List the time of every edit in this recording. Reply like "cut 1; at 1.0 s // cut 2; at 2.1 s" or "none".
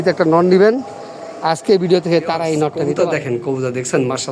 cut 1; at 2.9 s